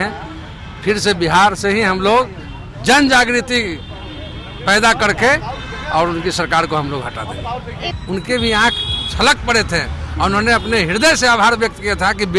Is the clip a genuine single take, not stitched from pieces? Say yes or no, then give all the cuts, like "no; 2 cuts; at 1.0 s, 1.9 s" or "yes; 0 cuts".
no; 1 cut; at 7.9 s